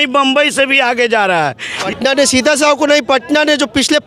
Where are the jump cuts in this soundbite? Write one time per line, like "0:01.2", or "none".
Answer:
0:01.9